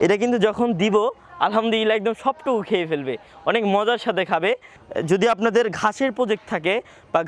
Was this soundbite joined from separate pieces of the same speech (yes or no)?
no